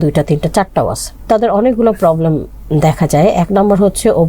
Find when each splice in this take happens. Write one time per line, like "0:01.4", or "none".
0:01.2